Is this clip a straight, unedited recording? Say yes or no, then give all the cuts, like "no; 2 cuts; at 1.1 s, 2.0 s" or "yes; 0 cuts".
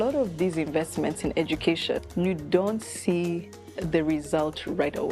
no; 1 cut; at 2.0 s